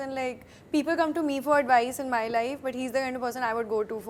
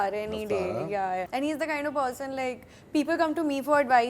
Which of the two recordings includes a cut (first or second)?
second